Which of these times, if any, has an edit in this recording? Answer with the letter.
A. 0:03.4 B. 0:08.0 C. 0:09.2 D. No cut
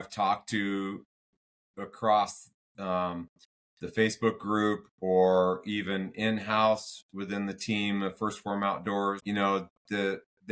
C